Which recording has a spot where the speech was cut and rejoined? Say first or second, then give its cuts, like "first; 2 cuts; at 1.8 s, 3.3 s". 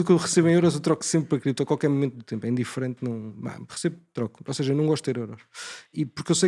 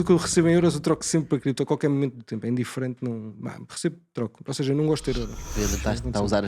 second; 1 cut; at 5.4 s